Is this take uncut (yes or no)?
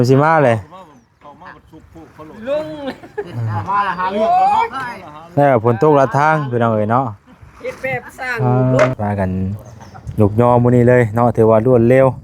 no